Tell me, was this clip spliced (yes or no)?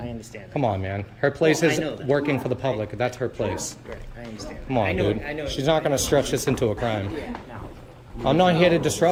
no